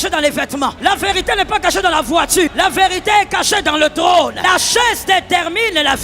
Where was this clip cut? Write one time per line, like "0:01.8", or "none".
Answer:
0:00.8
0:02.5
0:04.4